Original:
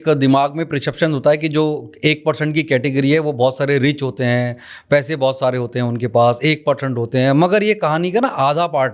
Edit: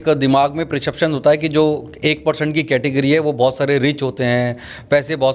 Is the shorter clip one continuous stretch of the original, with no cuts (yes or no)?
yes